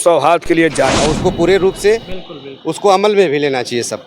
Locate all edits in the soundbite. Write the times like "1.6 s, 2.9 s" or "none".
0.9 s